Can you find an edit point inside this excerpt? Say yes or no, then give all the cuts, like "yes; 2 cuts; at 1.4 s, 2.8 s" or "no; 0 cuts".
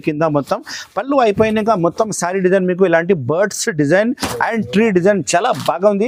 no; 0 cuts